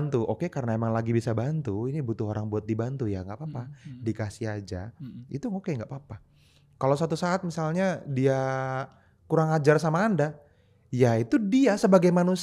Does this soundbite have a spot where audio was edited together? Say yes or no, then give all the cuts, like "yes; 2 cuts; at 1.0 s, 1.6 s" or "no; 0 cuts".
no; 0 cuts